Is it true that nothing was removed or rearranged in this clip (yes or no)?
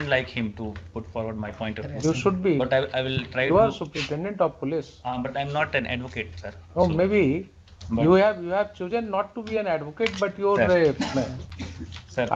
yes